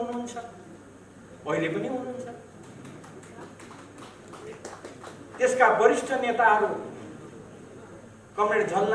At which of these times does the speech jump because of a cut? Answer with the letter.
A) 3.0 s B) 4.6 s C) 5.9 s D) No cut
D